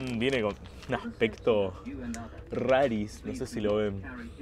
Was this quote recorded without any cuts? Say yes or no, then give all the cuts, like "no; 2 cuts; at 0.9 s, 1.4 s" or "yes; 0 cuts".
yes; 0 cuts